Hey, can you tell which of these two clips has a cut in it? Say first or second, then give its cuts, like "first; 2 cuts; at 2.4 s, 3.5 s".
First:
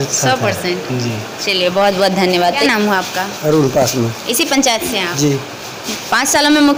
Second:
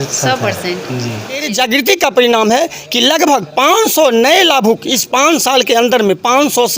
second; 1 cut; at 1.5 s